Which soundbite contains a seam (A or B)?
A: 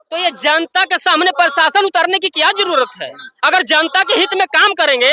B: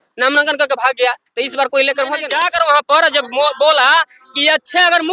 B